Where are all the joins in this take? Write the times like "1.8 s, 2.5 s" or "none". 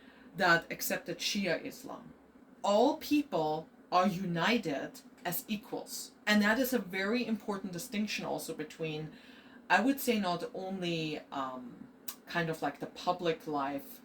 2.3 s